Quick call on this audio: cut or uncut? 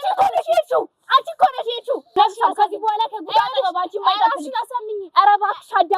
cut